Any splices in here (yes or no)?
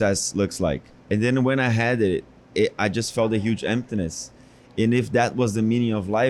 no